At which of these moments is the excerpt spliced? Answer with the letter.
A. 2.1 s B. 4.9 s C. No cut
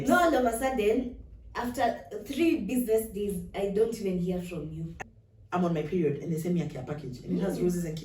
B